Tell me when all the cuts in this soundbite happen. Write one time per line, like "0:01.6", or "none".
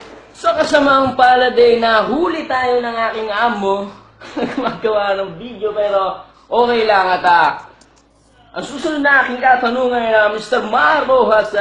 0:10.6